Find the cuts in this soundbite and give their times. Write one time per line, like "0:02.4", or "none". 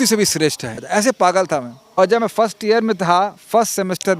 0:00.8
0:01.8

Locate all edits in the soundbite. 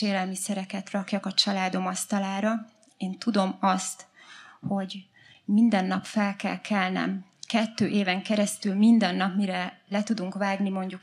none

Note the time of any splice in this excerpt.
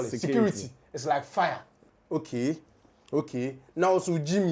0:01.9

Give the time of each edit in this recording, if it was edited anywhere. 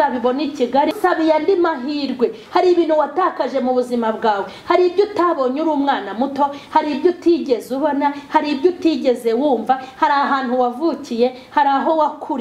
0:00.9

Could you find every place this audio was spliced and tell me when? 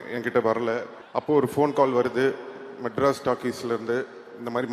0:01.0

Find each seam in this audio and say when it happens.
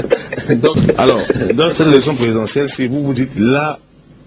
0:01.7

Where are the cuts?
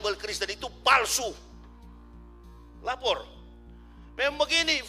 none

